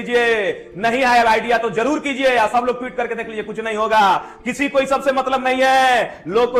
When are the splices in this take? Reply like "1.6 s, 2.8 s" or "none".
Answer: none

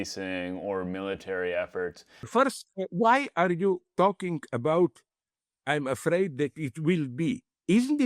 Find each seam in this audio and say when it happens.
2.2 s

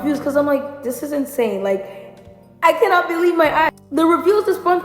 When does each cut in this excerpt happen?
3.7 s

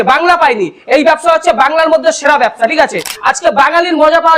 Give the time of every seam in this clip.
3.1 s

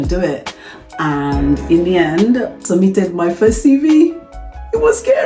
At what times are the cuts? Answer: 2.6 s

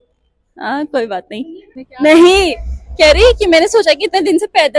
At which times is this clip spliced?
1.8 s

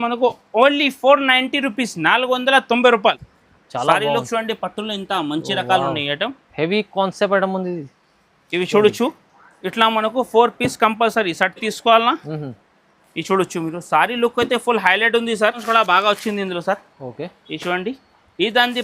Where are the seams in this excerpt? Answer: 3.2 s, 15.6 s

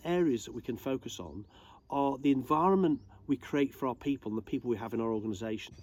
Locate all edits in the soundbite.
none

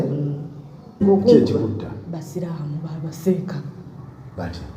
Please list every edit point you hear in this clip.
1.0 s

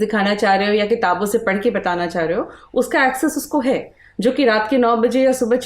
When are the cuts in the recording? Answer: none

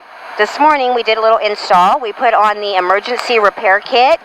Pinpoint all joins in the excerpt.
none

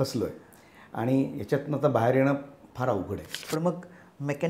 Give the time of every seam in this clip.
3.3 s

